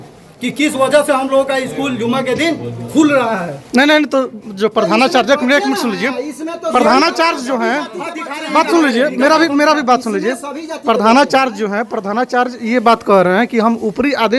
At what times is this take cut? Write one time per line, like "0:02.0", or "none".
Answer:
none